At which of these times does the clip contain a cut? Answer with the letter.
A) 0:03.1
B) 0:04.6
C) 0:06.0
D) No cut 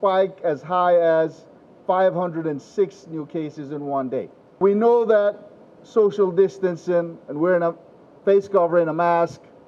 B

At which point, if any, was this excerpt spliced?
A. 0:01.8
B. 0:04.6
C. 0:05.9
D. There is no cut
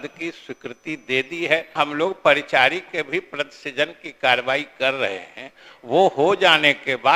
A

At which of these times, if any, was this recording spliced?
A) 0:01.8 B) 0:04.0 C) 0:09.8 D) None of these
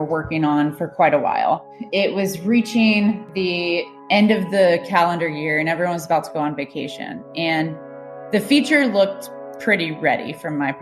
A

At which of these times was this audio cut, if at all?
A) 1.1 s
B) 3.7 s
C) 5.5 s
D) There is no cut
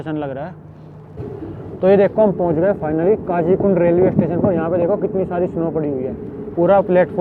A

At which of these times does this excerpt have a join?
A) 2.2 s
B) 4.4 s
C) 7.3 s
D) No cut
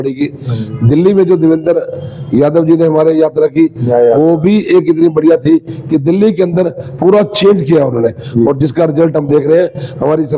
D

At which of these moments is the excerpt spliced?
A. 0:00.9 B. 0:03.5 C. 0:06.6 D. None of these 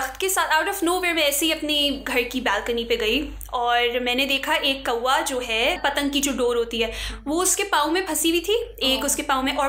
D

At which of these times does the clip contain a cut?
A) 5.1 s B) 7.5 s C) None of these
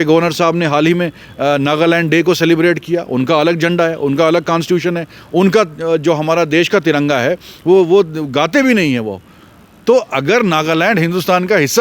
C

